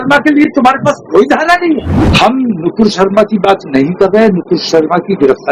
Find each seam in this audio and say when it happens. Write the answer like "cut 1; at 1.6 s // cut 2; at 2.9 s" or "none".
cut 1; at 1.9 s